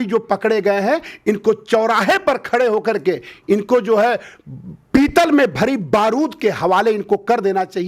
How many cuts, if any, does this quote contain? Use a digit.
0